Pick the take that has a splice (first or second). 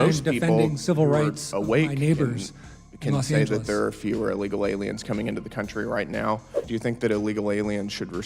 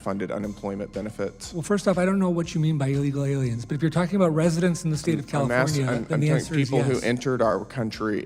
first